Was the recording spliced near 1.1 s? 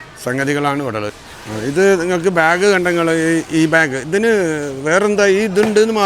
yes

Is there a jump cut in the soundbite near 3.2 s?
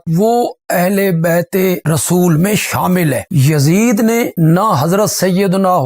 yes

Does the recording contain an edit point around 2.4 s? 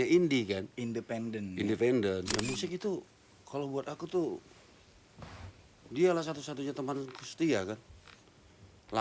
yes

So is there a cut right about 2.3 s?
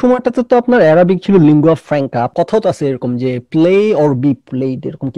yes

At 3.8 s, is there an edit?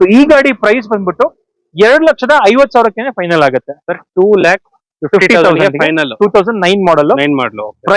no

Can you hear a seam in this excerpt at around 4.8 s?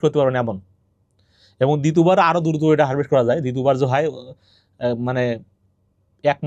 no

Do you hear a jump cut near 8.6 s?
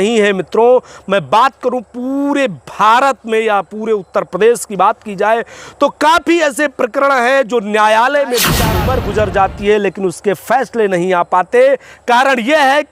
yes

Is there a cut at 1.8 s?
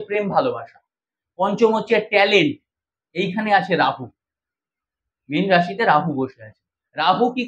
no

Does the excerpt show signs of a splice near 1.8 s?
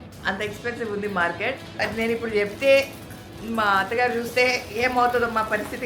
yes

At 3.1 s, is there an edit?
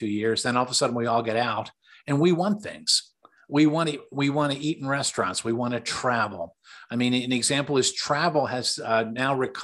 no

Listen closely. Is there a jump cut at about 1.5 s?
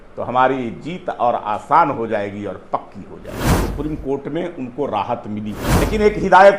no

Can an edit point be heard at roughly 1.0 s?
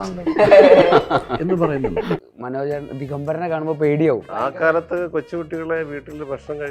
no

